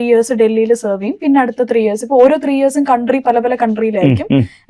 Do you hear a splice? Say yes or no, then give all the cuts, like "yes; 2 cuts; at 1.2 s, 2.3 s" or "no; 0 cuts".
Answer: no; 0 cuts